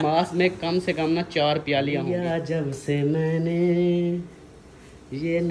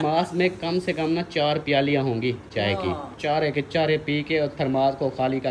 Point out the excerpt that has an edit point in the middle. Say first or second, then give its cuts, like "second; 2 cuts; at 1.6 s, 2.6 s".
first; 1 cut; at 2.0 s